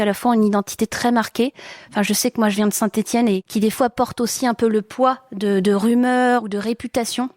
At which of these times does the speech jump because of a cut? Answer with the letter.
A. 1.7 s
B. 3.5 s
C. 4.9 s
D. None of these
B